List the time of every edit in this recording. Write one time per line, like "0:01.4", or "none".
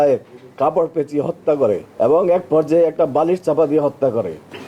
0:01.9